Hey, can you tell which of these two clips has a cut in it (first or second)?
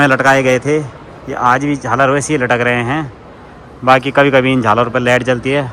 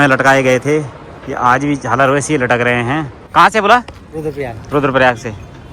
second